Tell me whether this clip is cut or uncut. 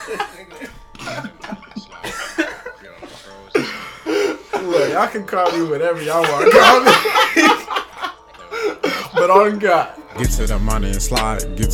cut